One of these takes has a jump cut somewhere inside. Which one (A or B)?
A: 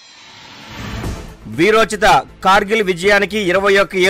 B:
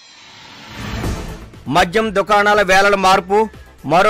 A